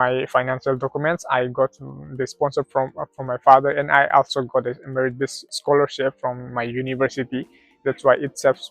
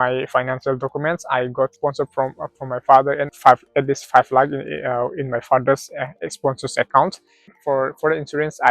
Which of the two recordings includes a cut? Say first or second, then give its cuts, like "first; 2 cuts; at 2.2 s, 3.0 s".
second; 3 cuts; at 1.7 s, 3.3 s, 7.6 s